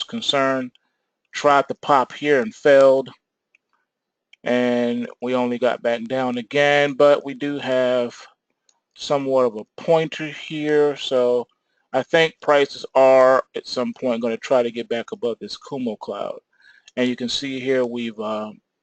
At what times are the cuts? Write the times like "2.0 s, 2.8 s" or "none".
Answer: 17.8 s